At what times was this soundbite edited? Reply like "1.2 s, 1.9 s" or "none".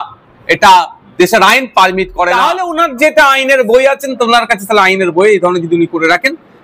2.3 s